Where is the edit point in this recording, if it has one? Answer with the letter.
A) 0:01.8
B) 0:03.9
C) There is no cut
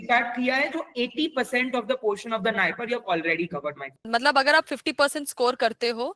B